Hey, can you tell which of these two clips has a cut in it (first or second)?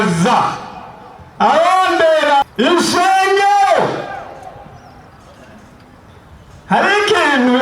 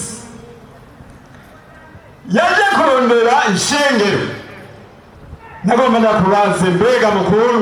first